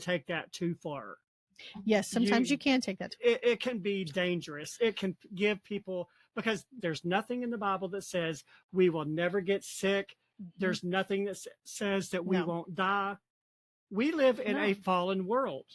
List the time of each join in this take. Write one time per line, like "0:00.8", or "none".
0:06.7